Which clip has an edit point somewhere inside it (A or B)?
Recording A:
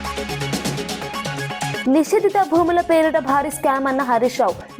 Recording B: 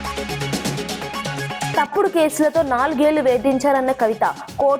A